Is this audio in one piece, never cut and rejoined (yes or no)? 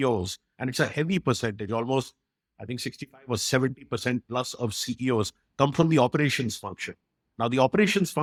yes